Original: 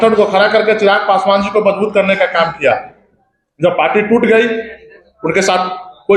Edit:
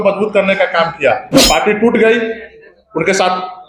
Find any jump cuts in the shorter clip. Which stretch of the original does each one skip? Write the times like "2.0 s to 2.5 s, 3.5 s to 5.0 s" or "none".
2.8 s to 3.5 s

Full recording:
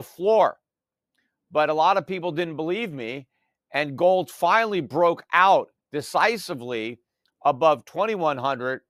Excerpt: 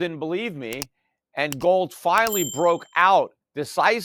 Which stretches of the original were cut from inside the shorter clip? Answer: none

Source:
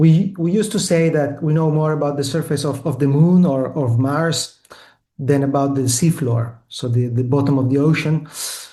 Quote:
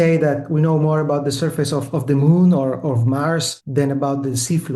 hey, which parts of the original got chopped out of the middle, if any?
4.5 s to 5.1 s

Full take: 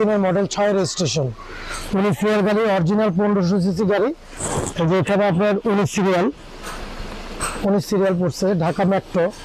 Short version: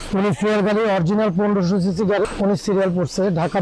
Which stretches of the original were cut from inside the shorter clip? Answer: 4.1 s to 7.5 s

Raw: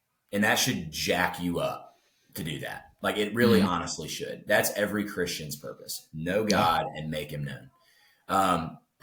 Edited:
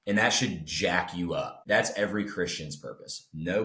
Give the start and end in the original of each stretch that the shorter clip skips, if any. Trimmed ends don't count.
1.8 s to 4.4 s

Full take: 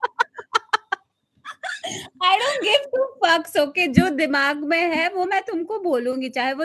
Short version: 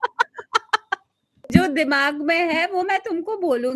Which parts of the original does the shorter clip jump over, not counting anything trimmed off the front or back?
1.5 s to 3.9 s

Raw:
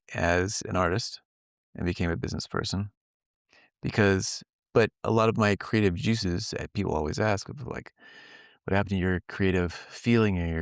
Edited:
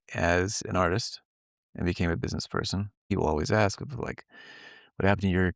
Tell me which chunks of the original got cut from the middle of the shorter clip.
3.0 s to 6.7 s

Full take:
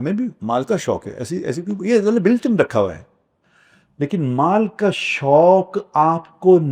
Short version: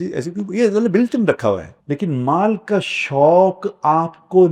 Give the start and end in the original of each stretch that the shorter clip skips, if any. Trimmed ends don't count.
3.0 s to 3.8 s

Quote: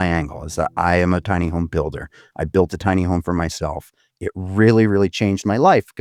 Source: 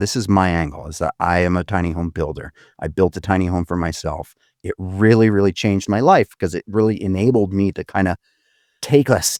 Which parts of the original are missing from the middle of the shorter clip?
none

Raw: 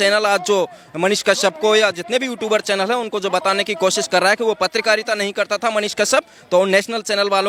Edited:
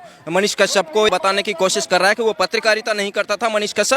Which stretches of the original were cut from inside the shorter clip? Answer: 1.8 s to 3.3 s

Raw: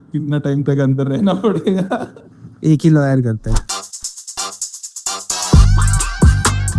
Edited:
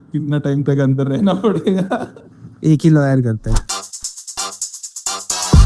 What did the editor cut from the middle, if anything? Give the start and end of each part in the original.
none

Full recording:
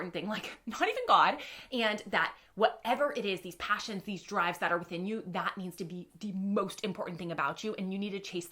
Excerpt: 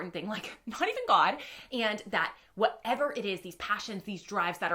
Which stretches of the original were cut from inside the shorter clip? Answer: none

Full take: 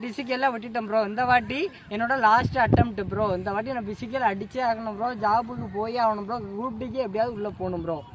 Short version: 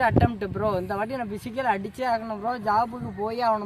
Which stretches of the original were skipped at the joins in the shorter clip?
none

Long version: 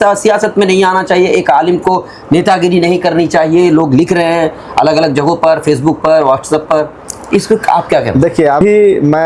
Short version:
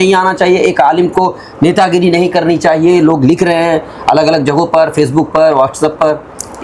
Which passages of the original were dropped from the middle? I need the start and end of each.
none

